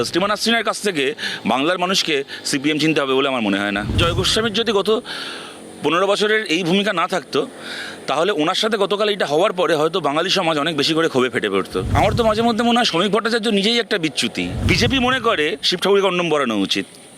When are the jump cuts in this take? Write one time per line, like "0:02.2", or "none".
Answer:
0:04.0
0:11.8
0:14.6